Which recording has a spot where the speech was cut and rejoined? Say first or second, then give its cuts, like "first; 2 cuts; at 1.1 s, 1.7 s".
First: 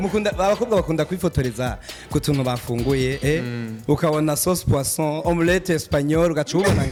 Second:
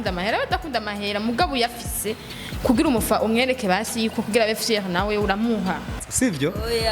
second; 1 cut; at 5.9 s